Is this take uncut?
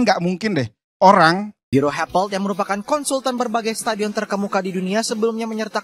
no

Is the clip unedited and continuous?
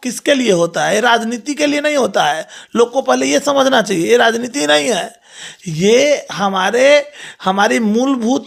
yes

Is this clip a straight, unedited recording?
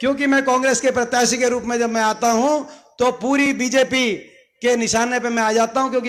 yes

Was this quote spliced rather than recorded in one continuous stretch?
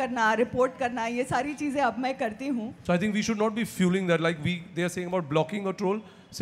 yes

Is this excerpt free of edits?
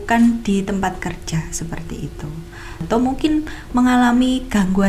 no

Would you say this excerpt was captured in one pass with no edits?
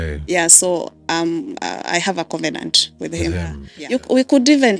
no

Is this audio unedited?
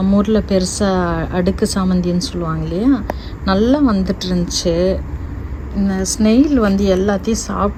yes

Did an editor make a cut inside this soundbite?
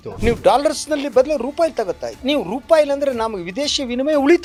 no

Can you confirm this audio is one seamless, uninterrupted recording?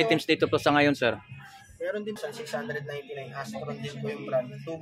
no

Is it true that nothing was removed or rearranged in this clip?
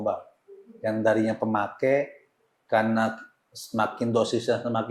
yes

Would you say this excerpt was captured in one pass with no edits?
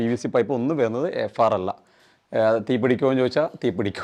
yes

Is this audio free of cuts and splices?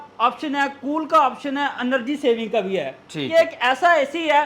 no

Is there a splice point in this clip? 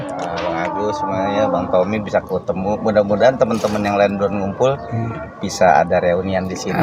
no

